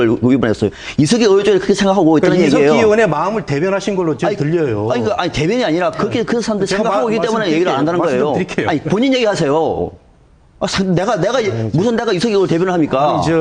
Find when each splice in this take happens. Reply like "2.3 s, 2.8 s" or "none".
none